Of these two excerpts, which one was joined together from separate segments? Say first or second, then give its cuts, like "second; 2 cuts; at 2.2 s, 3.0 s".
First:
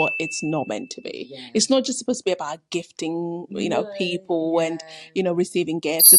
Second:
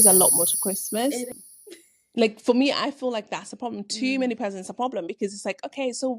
second; 1 cut; at 1.3 s